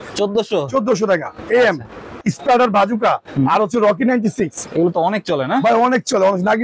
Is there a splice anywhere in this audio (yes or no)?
yes